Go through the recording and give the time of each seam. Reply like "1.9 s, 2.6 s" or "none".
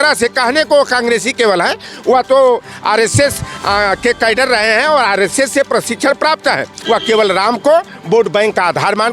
6.8 s